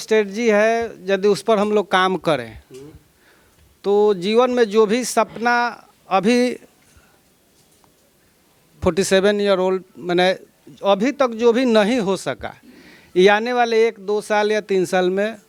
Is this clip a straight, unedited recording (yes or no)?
yes